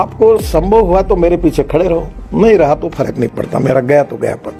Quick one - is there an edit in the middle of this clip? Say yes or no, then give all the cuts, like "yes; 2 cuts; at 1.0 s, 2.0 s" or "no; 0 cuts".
no; 0 cuts